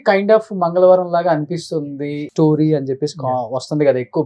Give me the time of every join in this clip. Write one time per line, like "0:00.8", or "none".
0:02.3